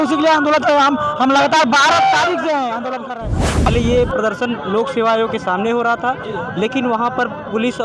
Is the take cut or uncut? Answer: cut